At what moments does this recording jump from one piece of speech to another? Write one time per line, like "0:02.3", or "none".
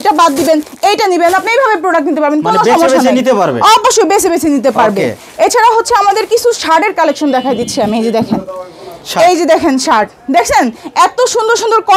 none